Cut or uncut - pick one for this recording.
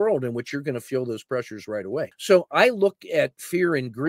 cut